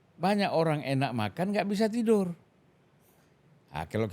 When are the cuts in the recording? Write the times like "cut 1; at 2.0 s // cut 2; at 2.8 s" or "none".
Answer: none